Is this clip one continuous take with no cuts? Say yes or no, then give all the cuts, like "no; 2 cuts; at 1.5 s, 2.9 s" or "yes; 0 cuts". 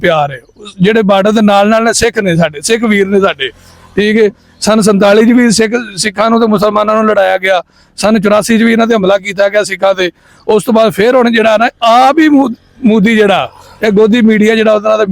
yes; 0 cuts